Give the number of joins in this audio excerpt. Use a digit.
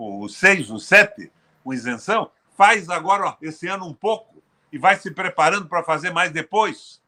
0